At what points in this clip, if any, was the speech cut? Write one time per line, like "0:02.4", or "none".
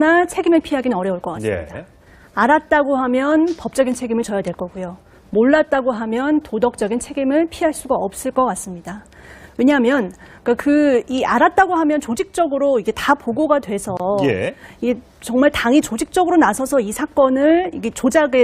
0:03.2